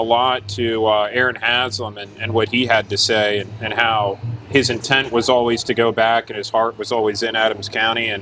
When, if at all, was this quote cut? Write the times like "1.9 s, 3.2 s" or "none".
none